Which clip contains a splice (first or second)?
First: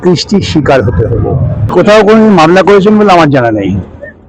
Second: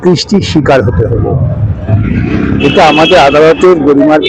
first